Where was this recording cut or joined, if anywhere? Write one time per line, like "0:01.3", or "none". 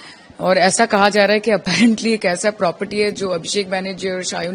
none